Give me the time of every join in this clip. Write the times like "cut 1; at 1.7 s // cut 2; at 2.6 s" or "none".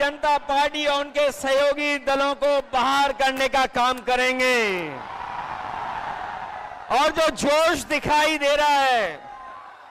none